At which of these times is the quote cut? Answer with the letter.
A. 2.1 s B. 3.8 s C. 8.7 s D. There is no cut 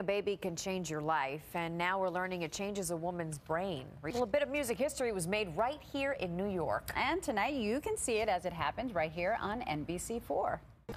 B